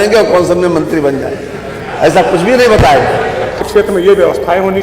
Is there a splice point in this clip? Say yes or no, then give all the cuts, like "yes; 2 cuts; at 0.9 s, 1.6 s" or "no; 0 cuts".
yes; 1 cut; at 3.7 s